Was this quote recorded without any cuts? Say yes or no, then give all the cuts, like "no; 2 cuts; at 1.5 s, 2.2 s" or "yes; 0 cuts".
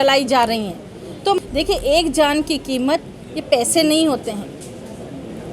no; 1 cut; at 1.4 s